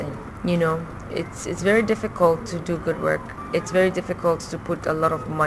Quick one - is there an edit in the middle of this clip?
yes; 1 cut; at 3.2 s

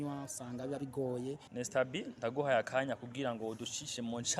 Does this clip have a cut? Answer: yes; 1 cut; at 1.5 s

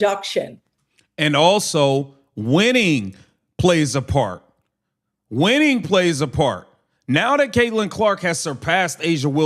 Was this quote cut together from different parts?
no; 0 cuts

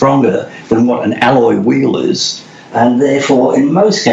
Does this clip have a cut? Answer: no; 0 cuts

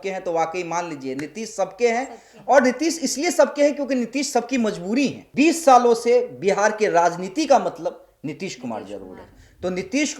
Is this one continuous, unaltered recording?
no; 1 cut; at 5.2 s

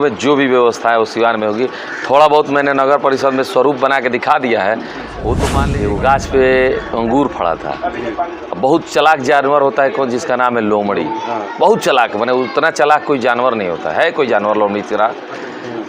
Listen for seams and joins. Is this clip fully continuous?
no; 1 cut; at 5.6 s

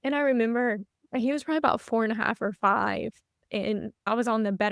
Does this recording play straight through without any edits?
no; 1 cut; at 0.9 s

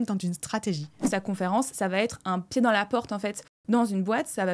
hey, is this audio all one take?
no; 1 cut; at 1.1 s

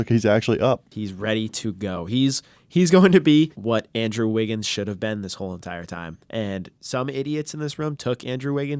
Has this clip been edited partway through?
yes; 4 cuts; at 0.9 s, 3.6 s, 6.2 s, 6.8 s

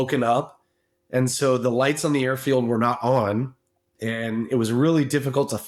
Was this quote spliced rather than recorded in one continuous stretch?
no; 0 cuts

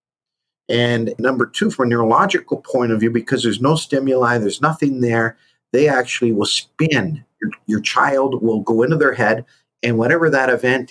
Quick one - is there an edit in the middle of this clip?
yes; 1 cut; at 1.2 s

